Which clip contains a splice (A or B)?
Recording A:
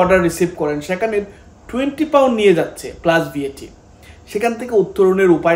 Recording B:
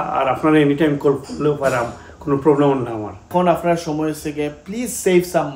B